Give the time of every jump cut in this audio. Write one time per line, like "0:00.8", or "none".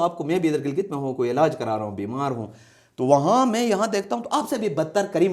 none